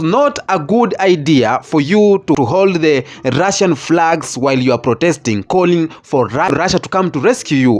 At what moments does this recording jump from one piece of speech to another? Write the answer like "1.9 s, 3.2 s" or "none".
2.4 s, 6.7 s